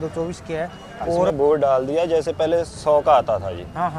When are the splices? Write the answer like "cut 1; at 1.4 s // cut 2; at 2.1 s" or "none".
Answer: cut 1; at 1.3 s